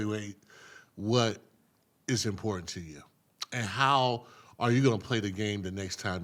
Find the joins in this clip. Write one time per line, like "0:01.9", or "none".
none